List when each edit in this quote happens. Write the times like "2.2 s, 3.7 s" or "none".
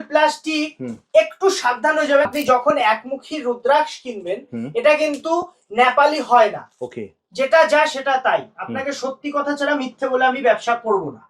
2.3 s

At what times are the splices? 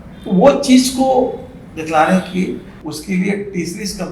2.7 s

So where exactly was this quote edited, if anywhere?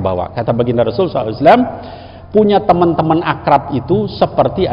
none

